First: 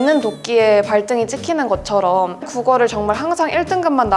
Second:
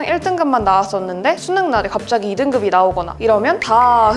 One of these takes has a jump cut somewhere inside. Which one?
first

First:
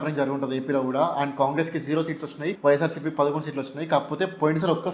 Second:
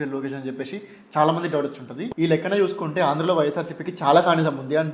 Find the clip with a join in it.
second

